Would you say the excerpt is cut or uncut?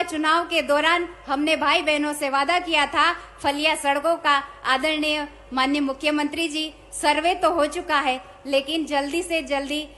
uncut